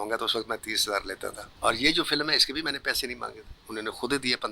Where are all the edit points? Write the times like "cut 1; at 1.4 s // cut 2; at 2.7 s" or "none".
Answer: cut 1; at 1.4 s